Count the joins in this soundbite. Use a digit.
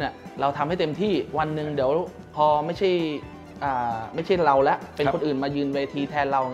0